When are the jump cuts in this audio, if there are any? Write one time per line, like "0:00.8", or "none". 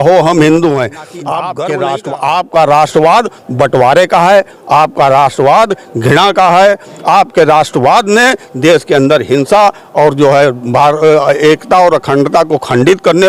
0:01.5